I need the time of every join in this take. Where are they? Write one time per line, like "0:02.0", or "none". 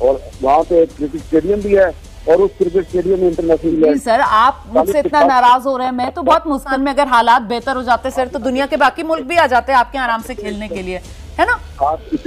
0:03.7
0:06.7